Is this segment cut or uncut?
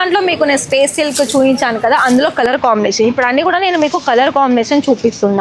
uncut